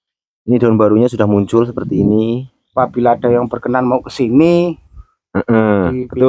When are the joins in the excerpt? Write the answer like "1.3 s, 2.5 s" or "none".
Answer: 2.6 s